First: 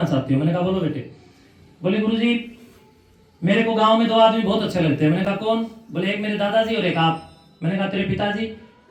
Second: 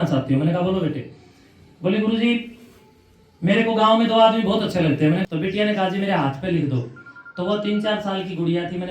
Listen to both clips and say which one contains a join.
second; 1 cut; at 5.2 s

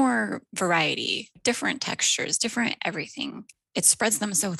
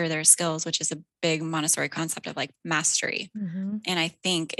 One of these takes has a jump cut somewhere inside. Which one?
first; 2 cuts; at 1.3 s, 3.6 s

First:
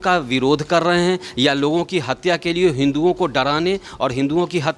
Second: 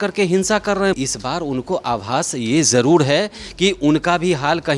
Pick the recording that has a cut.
second; 1 cut; at 0.9 s

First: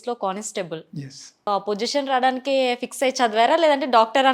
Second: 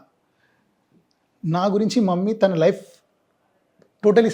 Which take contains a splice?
first; 1 cut; at 1.5 s

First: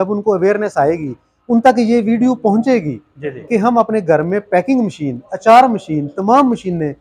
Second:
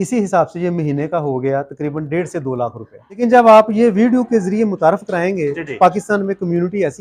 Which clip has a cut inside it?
second; 1 cut; at 3.2 s

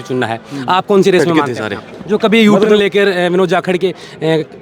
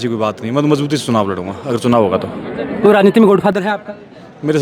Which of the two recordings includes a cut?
first; 1 cut; at 1.4 s

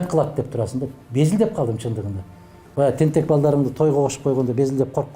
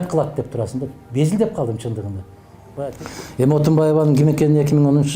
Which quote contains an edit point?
second; 1 cut; at 2.9 s

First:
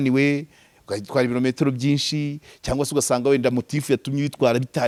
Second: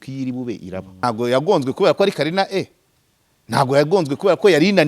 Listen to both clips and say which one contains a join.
second; 1 cut; at 1.0 s

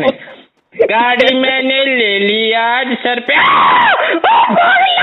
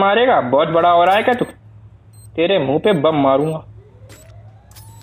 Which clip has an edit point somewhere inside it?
second; 1 cut; at 3.7 s

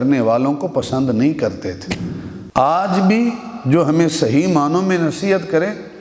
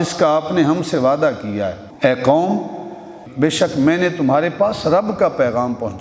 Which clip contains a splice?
second; 2 cuts; at 1.8 s, 3.2 s

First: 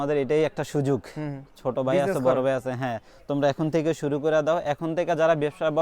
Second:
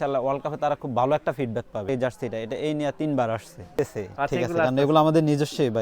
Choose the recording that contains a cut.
second; 2 cuts; at 1.9 s, 3.7 s

